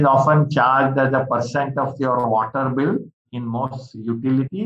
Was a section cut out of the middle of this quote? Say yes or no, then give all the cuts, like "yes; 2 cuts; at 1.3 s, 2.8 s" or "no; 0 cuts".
no; 0 cuts